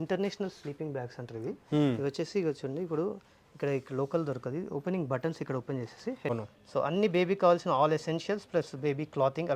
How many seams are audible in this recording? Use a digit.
1